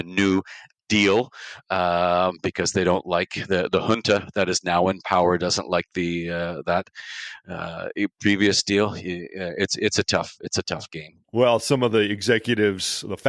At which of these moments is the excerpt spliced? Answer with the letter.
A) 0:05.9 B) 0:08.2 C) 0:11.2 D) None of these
C